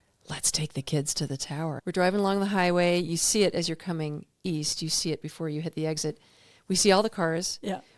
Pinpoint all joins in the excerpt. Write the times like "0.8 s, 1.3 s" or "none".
1.8 s